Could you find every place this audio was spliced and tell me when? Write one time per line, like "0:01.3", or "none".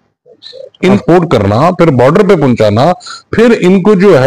0:01.0